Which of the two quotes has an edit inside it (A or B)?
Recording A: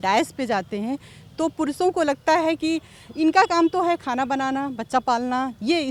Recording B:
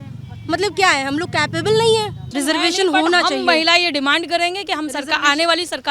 B